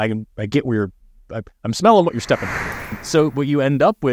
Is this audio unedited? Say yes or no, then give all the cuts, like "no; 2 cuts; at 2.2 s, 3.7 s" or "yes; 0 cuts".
no; 1 cut; at 3.0 s